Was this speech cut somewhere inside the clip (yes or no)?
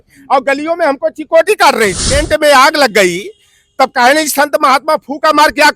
yes